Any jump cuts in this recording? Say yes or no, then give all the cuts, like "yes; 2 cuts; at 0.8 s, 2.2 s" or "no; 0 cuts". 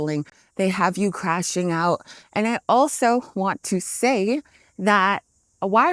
no; 0 cuts